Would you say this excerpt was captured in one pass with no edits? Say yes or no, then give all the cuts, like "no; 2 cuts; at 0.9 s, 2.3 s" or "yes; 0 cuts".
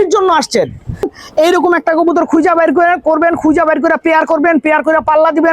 no; 1 cut; at 1.1 s